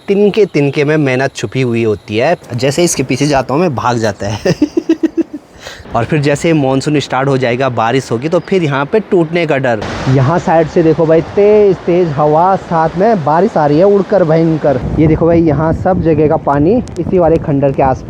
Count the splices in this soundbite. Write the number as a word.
four